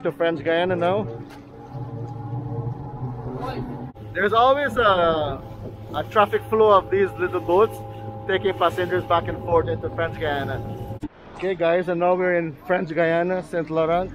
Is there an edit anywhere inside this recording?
yes; 2 cuts; at 3.9 s, 10.9 s

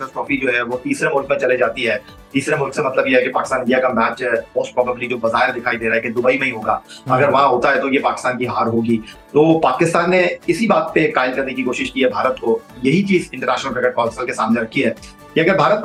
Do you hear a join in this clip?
no; 0 cuts

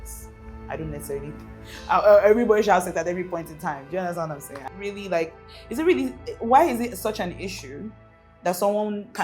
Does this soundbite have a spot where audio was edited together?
yes; 1 cut; at 4.6 s

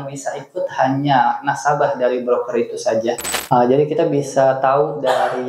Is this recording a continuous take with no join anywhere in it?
no; 1 cut; at 3.3 s

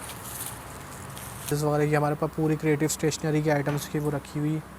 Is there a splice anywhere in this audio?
yes; 1 cut; at 1.5 s

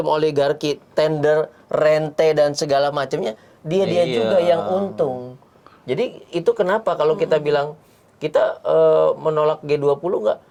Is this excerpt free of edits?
yes; 0 cuts

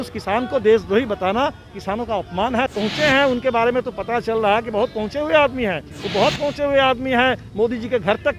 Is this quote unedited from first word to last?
no; 2 cuts; at 2.7 s, 5.9 s

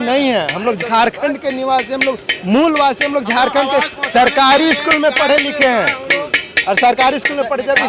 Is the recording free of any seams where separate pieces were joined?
yes; 0 cuts

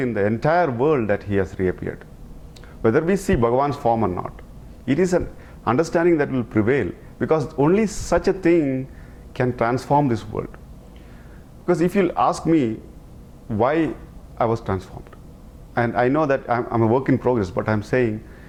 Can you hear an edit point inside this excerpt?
no; 0 cuts

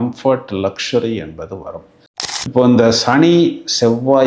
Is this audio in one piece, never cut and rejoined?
no; 1 cut; at 2.1 s

